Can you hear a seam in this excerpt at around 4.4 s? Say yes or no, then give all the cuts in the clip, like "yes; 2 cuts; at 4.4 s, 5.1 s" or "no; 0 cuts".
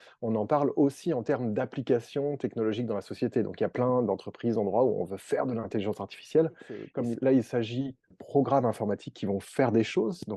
no; 2 cuts; at 6.8 s, 8.1 s